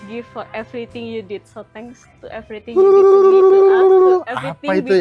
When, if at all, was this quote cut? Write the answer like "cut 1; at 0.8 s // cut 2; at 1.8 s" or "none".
none